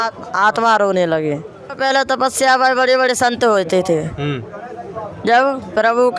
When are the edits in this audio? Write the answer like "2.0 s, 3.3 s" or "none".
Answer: 1.8 s

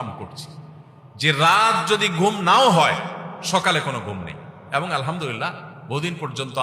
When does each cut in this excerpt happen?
none

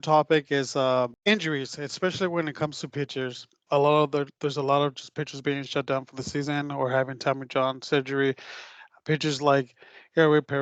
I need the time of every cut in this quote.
1.2 s, 3.5 s

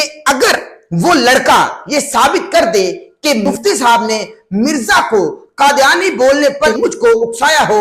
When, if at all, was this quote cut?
3.5 s, 6.7 s

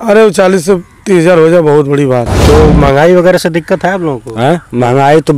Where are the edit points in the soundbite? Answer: 2.3 s

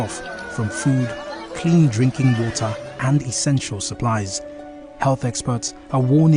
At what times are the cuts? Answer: none

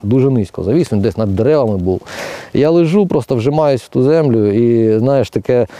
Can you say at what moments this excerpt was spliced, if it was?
none

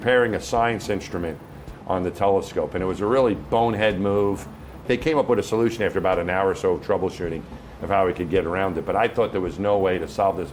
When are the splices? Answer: 4.8 s

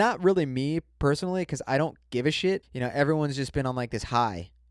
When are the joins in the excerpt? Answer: 2.7 s

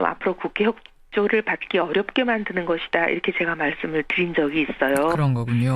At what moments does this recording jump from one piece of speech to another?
2.9 s

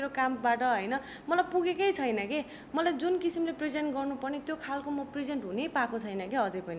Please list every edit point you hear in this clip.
none

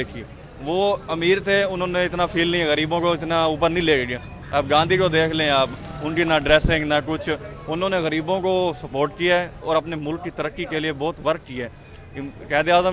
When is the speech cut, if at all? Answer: none

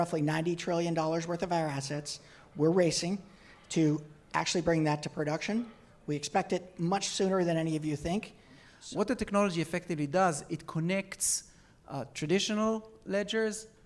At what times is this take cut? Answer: 8.7 s

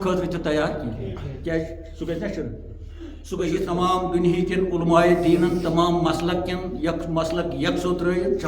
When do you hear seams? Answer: 3.6 s

